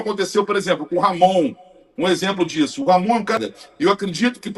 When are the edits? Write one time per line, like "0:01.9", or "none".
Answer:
0:03.4